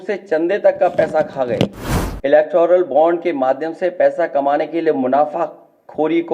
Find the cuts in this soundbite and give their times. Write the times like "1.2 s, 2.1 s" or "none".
1.7 s